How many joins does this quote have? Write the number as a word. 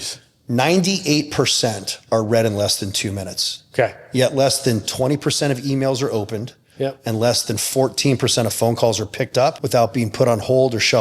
one